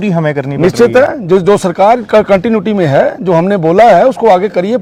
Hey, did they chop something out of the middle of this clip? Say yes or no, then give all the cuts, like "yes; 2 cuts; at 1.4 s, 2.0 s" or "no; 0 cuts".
no; 0 cuts